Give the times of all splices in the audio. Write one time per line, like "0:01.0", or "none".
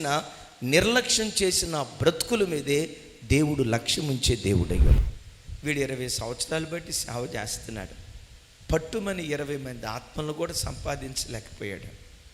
0:05.0